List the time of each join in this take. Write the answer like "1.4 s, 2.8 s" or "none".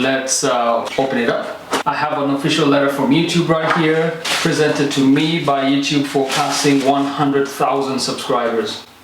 0.9 s, 6.8 s